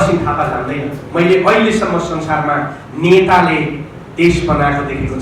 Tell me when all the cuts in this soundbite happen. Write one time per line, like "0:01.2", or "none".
0:01.0